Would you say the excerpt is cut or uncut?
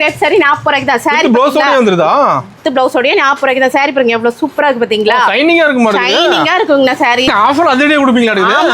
uncut